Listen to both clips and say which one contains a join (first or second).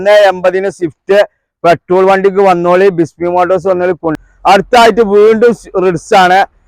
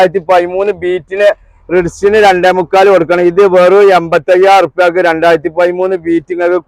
first